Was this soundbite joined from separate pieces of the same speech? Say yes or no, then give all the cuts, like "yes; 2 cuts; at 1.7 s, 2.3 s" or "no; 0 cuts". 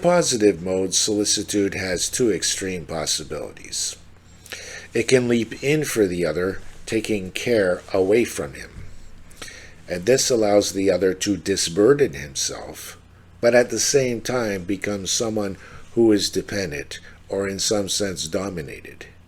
no; 0 cuts